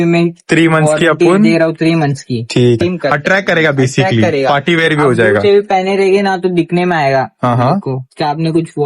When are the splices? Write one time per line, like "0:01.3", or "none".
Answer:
0:02.8